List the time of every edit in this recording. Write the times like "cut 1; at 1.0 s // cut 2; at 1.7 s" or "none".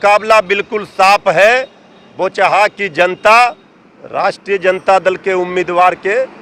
none